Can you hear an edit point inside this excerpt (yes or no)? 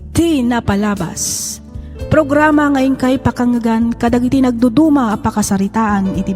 yes